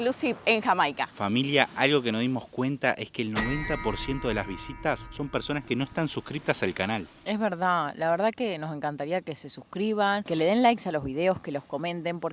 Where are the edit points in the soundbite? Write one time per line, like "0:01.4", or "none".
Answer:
none